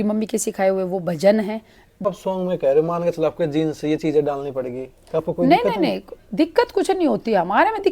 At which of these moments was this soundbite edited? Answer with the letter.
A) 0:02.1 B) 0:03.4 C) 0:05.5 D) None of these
A